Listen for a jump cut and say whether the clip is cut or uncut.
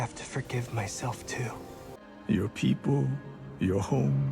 cut